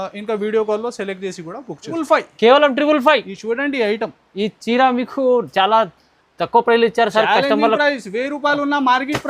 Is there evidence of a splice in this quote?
yes; 1 cut; at 2.0 s

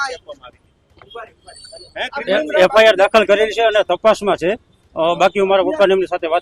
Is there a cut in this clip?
no; 0 cuts

